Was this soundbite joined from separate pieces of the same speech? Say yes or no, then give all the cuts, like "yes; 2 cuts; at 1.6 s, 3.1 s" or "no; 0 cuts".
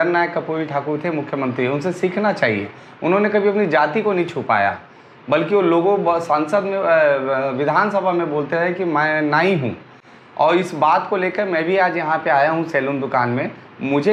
no; 0 cuts